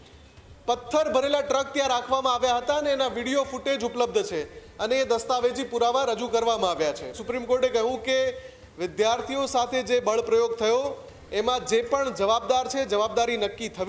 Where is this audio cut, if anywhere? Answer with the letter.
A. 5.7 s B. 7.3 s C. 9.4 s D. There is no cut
B